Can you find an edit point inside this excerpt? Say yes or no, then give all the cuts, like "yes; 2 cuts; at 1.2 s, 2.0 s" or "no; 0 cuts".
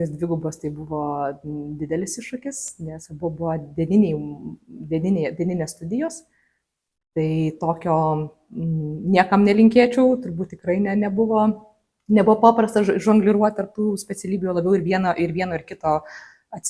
no; 0 cuts